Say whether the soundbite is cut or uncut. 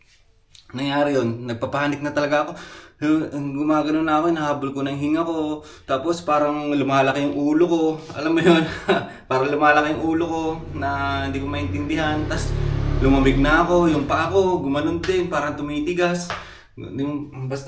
uncut